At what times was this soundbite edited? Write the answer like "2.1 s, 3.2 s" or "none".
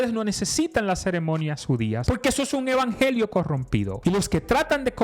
2.0 s, 3.9 s

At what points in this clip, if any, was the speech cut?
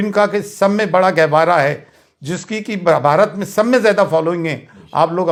none

